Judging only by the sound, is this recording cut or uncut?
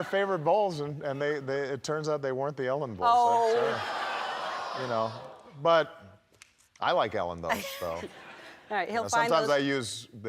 uncut